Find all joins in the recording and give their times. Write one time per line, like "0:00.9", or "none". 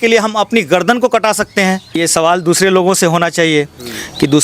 0:02.0